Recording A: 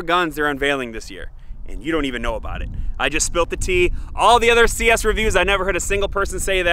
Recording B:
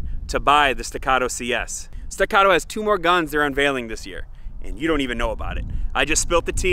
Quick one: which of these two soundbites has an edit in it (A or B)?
B